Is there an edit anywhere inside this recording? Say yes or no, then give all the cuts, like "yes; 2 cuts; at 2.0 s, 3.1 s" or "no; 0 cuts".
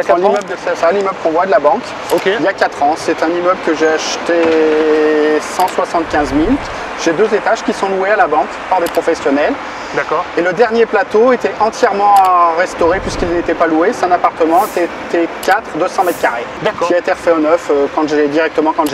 no; 0 cuts